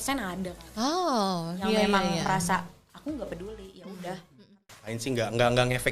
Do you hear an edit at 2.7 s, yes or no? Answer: no